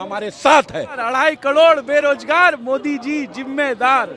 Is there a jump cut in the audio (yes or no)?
yes